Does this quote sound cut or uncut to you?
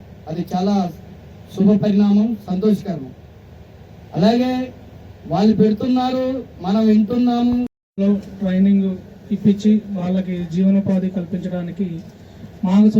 cut